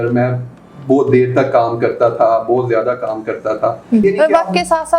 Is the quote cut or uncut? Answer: cut